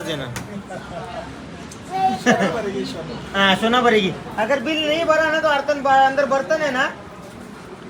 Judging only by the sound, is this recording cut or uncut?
uncut